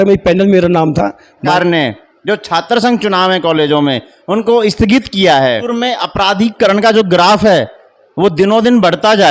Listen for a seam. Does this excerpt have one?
yes; 2 cuts; at 1.5 s, 5.7 s

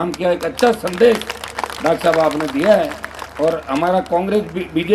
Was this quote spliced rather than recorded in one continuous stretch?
no; 0 cuts

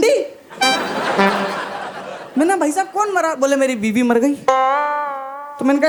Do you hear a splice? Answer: no; 0 cuts

